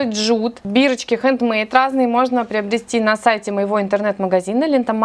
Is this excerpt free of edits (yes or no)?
yes